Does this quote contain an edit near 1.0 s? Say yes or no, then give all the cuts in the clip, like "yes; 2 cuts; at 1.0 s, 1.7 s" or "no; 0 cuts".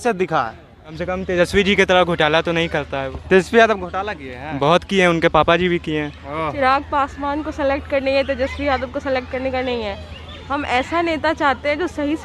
yes; 2 cuts; at 1.0 s, 6.5 s